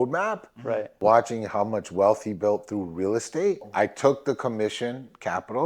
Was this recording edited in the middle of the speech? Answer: yes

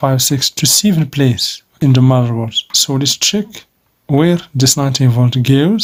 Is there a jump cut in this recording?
no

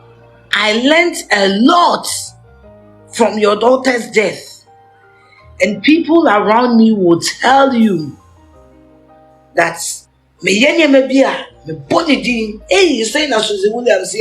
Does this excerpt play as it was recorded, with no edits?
no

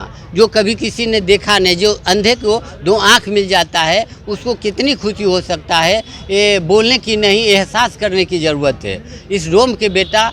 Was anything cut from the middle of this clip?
no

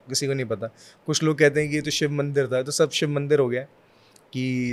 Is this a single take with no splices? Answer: yes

